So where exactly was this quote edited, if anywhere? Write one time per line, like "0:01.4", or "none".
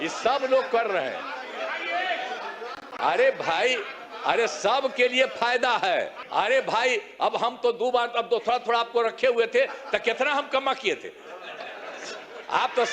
0:06.2